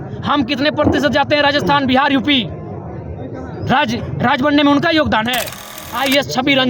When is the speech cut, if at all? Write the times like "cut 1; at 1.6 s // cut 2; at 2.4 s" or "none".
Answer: cut 1; at 5.7 s